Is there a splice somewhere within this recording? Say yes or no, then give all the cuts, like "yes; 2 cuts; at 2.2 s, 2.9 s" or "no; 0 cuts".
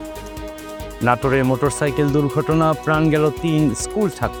no; 0 cuts